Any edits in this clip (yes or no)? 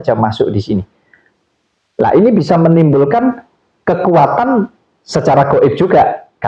no